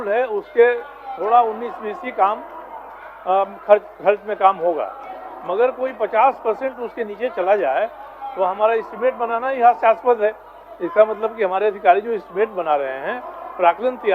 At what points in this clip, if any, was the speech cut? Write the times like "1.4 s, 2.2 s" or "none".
none